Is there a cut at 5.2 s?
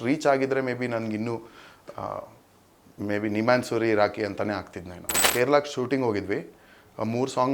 yes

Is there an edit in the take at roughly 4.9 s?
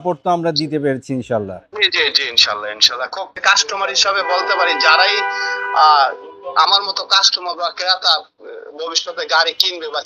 no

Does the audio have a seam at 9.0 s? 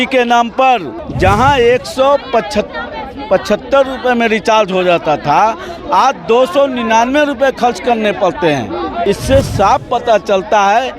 yes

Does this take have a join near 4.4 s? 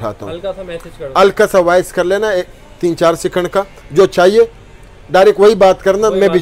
no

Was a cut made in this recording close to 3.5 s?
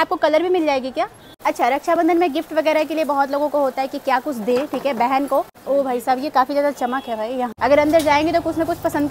no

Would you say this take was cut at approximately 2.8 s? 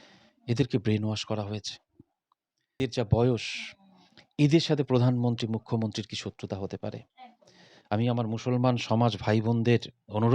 yes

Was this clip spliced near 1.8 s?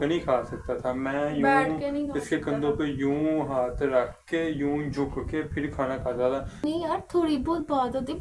no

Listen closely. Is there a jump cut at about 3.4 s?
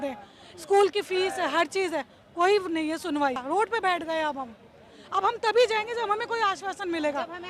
yes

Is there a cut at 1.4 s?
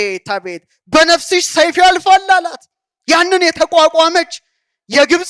no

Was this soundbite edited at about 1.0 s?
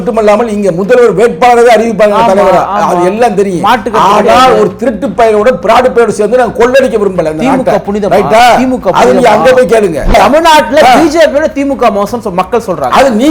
no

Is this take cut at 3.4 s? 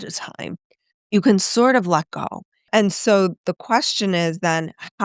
yes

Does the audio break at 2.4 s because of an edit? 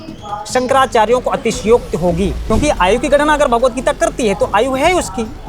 yes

